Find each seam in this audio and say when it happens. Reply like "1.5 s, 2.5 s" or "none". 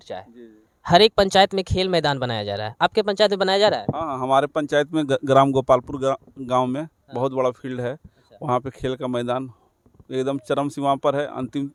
none

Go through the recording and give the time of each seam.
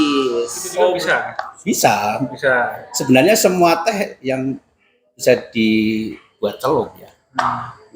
1.0 s

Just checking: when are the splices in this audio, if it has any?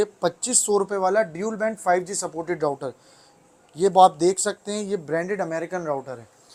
none

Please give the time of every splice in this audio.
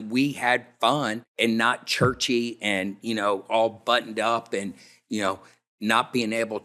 1.2 s

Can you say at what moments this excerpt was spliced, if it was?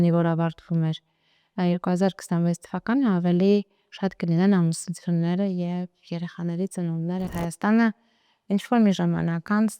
7.3 s

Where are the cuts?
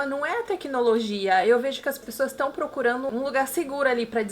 3.1 s

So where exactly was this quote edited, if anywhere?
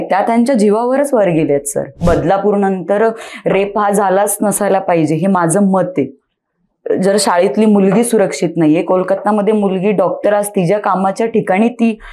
2.0 s

